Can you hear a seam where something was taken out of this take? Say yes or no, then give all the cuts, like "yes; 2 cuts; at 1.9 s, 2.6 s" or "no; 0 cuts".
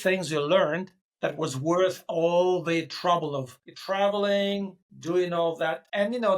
no; 0 cuts